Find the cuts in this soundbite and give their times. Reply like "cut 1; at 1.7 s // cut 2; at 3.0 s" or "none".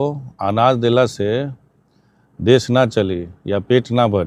none